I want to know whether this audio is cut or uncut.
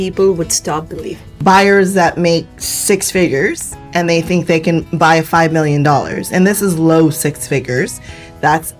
cut